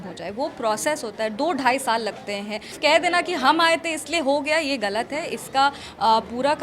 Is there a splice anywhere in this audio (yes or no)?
yes